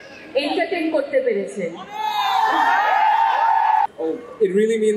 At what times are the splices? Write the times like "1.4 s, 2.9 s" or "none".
3.9 s